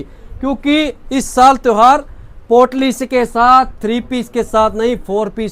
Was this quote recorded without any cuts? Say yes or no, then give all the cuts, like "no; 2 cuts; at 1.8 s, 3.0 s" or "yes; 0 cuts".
yes; 0 cuts